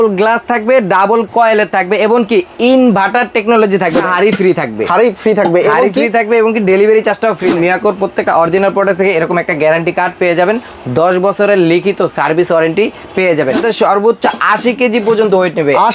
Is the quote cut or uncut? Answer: cut